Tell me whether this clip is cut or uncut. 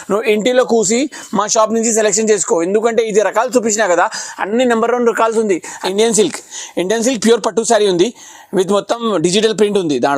cut